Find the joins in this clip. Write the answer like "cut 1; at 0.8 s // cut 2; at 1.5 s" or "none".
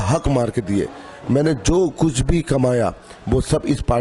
none